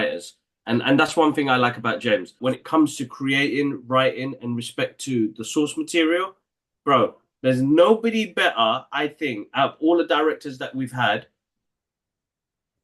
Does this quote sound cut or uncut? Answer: cut